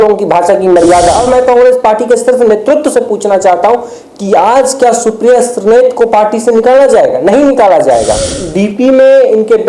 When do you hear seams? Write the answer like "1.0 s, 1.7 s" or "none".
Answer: 1.2 s, 8.4 s